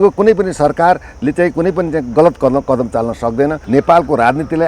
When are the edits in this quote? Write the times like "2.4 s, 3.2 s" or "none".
3.6 s